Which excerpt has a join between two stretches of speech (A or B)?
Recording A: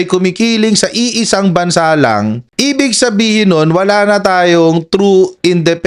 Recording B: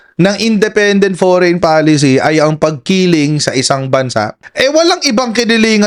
A